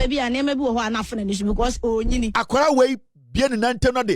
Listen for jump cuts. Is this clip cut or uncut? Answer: cut